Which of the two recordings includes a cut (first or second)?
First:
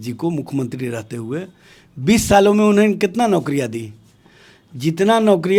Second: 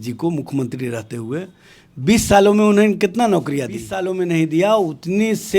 second